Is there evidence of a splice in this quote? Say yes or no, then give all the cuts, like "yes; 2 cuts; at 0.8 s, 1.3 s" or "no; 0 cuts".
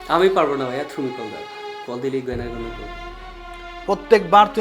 no; 0 cuts